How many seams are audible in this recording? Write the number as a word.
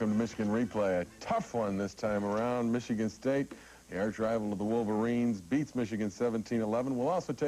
one